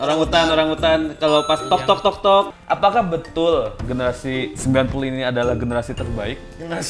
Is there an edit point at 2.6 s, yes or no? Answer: yes